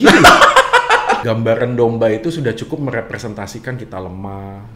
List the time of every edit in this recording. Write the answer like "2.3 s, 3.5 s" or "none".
1.2 s